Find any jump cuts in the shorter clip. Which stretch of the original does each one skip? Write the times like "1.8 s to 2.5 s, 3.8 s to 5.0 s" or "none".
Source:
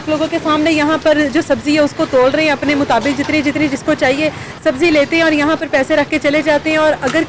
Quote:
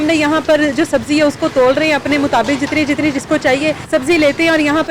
4.4 s to 4.5 s